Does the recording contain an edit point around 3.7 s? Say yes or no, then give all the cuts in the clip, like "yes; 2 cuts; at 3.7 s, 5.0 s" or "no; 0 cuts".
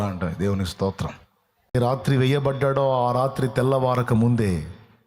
no; 1 cut; at 1.7 s